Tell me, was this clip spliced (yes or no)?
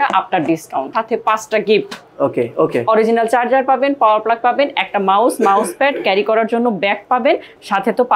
yes